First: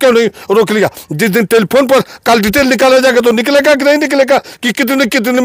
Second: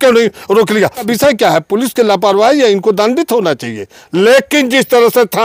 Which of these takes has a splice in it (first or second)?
second